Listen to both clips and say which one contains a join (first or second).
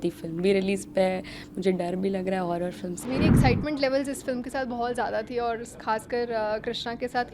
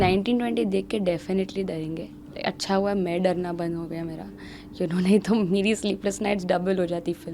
first